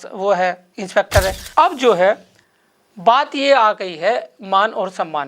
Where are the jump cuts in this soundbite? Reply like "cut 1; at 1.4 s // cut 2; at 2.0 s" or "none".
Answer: cut 1; at 1.4 s